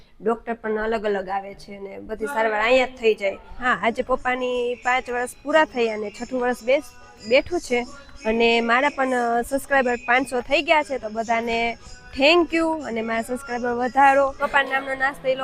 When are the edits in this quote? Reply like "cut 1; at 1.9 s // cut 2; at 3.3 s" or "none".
cut 1; at 3.7 s // cut 2; at 14.4 s